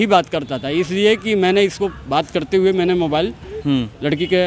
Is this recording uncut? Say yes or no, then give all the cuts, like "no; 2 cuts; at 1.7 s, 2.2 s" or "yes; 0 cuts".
yes; 0 cuts